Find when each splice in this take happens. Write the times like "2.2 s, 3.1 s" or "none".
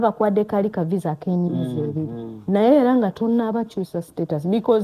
none